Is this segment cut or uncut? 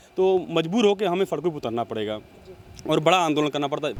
uncut